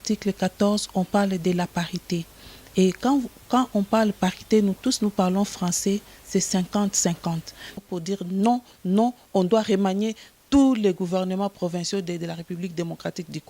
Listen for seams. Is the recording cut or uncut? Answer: cut